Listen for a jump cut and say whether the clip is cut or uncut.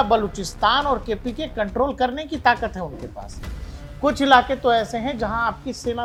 uncut